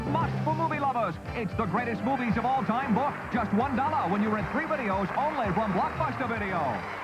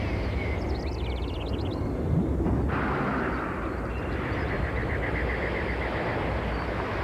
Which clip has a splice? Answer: second; 1 cut; at 4.7 s

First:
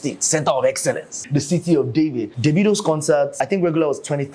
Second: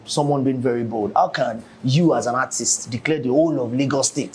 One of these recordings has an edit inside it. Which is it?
first; 3 cuts; at 1.2 s, 2.3 s, 3.4 s

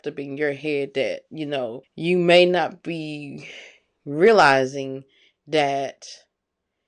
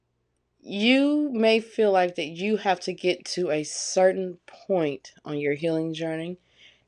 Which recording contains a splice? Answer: first; 1 cut; at 1.9 s

